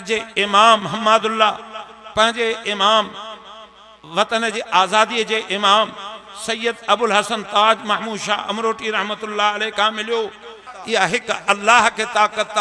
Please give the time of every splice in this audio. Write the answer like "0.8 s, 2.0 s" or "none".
10.7 s